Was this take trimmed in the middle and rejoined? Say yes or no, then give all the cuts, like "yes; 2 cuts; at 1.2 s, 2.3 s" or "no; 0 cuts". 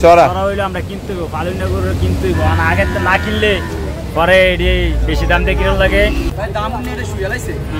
yes; 1 cut; at 6.3 s